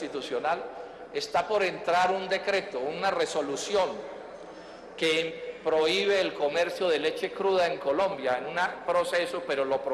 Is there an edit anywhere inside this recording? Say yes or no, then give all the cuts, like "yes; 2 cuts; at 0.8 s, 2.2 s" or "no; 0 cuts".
yes; 1 cut; at 1.6 s